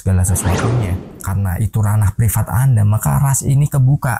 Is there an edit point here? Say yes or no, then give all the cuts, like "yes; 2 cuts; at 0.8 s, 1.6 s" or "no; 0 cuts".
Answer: yes; 1 cut; at 1.1 s